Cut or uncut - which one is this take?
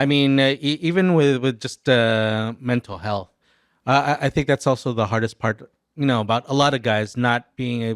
uncut